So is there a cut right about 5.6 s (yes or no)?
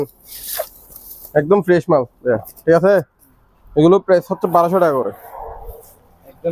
no